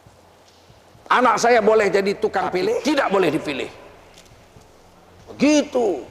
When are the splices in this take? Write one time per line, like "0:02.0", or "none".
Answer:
0:02.8